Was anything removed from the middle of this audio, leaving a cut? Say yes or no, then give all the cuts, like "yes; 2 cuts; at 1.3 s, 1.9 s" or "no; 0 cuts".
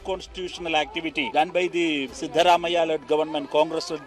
yes; 2 cuts; at 1.3 s, 2.2 s